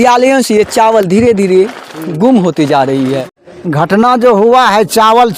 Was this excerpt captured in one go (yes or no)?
no